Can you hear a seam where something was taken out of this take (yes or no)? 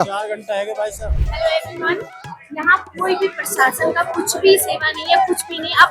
yes